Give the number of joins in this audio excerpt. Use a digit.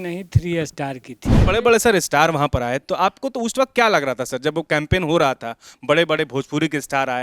1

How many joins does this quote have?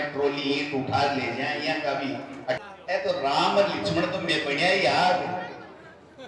1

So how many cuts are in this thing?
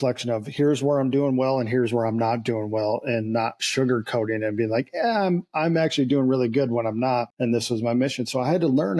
1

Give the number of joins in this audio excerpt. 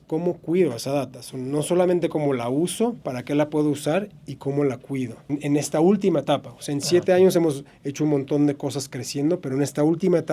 1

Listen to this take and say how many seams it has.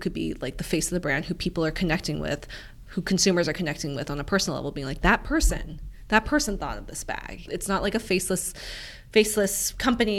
0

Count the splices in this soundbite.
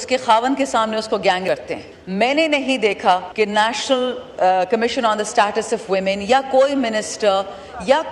2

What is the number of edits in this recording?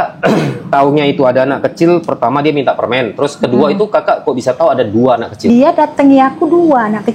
1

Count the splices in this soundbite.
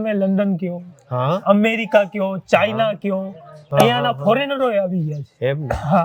0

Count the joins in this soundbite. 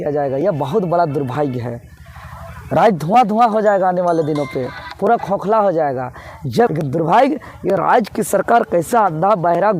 1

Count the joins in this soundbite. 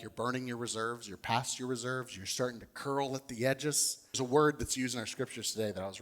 1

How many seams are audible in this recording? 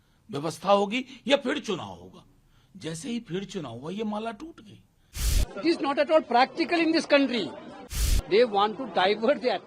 2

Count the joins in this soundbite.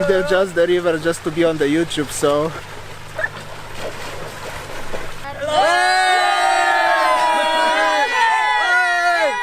1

